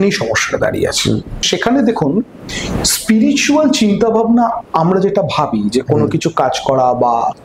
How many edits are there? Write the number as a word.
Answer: one